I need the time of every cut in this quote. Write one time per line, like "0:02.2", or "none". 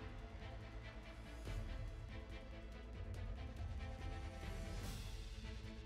none